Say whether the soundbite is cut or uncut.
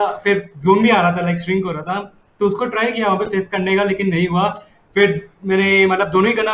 uncut